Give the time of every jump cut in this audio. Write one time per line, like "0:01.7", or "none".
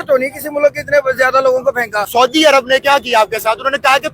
0:02.0